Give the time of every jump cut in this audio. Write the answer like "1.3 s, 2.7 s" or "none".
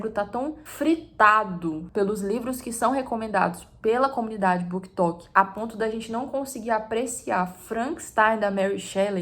1.8 s